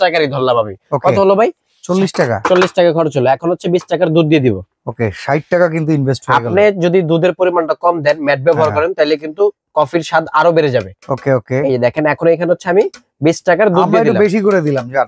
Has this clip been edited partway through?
no; 0 cuts

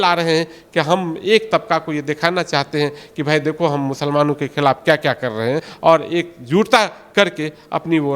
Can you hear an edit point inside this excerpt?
no; 0 cuts

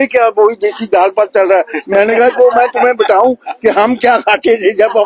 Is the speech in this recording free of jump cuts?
yes; 0 cuts

